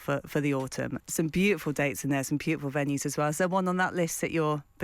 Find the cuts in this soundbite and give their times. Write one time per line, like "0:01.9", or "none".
0:01.0